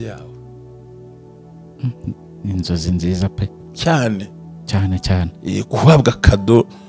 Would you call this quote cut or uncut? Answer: uncut